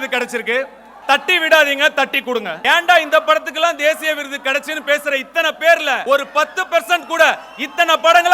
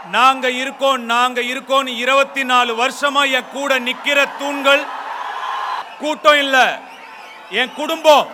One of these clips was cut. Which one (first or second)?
first